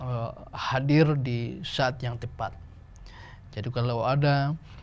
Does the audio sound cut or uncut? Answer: uncut